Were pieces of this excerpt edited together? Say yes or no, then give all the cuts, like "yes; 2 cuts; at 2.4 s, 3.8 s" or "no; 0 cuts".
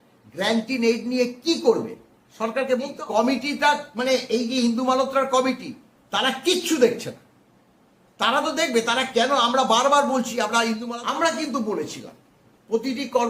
yes; 2 cuts; at 3.0 s, 10.8 s